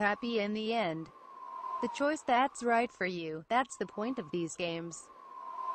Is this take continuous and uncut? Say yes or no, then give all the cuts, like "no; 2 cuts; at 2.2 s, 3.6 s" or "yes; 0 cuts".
no; 1 cut; at 3.0 s